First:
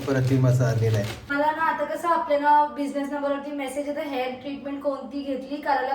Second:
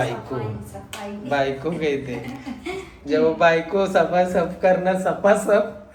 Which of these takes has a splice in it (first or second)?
first